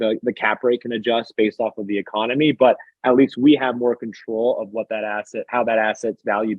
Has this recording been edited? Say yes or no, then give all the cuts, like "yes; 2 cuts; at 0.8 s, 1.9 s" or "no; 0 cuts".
no; 0 cuts